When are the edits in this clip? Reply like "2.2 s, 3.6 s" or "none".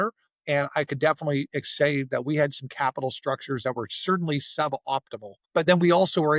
5.3 s